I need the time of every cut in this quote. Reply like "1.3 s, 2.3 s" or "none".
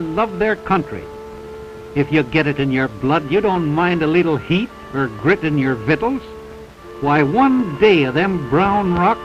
none